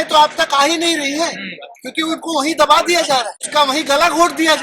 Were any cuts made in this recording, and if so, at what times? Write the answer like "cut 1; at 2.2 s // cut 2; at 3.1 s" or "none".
cut 1; at 3.4 s